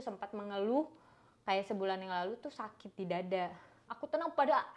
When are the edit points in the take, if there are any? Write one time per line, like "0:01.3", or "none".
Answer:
0:03.8